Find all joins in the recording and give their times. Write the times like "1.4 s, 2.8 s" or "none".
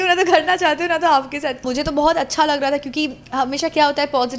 1.6 s